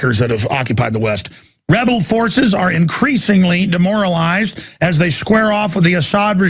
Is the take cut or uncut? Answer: cut